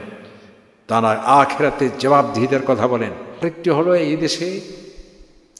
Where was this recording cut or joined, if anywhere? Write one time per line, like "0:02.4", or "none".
0:03.5